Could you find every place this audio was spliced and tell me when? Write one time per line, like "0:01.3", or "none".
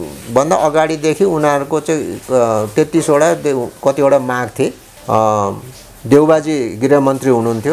0:04.9